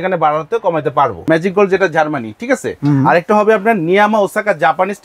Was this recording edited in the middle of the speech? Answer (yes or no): yes